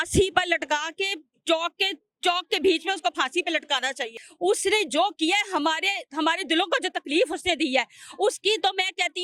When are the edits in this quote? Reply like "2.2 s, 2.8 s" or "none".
none